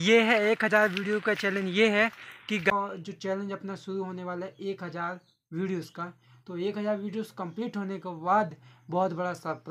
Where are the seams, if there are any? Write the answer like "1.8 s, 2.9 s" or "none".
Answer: 2.7 s

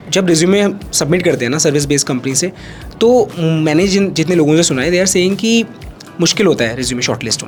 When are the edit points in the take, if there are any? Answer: none

